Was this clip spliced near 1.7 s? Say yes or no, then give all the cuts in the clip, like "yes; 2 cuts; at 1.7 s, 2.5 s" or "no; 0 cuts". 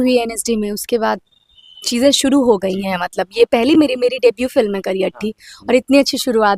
no; 0 cuts